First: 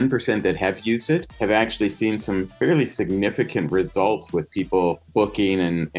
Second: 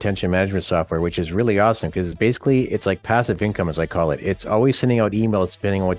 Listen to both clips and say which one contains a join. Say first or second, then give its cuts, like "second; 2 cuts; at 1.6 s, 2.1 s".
first; 2 cuts; at 1.3 s, 5.0 s